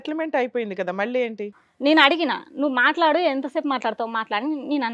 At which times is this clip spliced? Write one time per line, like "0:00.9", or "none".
0:01.6